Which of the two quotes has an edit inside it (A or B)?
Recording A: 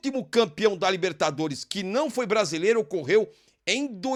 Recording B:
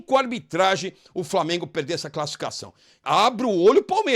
B